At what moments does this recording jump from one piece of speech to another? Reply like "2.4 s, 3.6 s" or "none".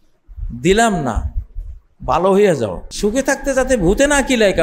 2.8 s